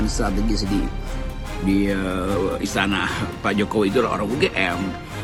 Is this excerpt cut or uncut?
uncut